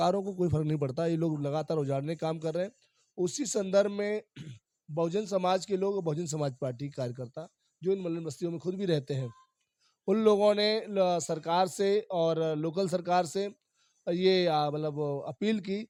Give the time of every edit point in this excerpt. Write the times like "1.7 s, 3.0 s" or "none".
none